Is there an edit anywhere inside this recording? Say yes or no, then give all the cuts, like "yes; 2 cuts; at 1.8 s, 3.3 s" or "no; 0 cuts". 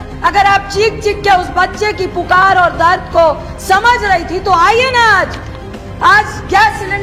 no; 0 cuts